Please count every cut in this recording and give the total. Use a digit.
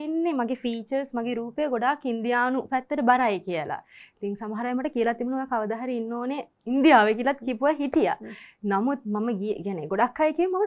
0